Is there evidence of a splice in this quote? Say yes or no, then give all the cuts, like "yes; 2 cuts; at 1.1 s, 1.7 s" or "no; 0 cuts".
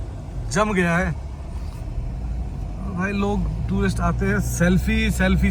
no; 0 cuts